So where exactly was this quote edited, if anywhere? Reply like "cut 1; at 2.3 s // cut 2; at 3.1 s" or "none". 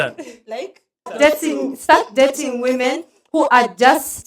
cut 1; at 1.1 s

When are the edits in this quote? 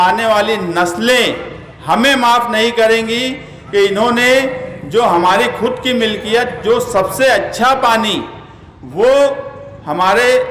none

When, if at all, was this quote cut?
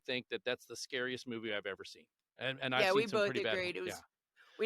none

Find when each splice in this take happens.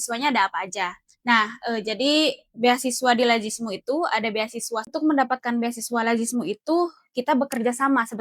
cut 1; at 4.9 s

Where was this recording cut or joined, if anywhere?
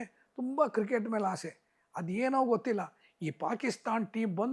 none

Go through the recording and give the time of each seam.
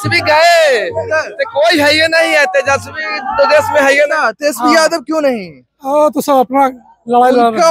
cut 1; at 4.1 s

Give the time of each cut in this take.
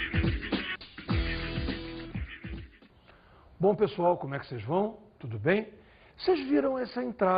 none

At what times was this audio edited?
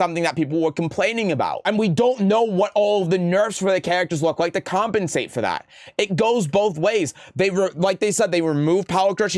cut 1; at 1.6 s

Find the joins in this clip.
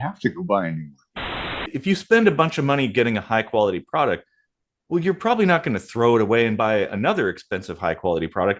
cut 1; at 1.3 s

